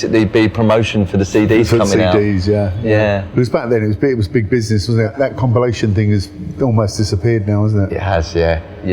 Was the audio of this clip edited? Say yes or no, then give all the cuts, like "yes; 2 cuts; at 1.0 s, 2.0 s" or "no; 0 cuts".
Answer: no; 0 cuts